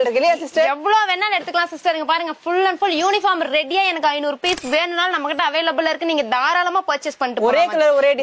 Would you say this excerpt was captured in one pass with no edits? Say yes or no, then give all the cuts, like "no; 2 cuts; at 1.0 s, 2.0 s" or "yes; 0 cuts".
yes; 0 cuts